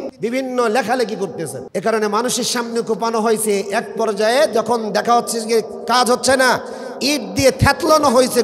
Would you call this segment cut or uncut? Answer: uncut